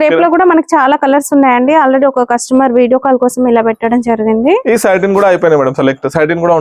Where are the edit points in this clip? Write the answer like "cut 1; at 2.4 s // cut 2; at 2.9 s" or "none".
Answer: none